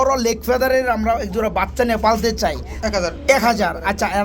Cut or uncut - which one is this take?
cut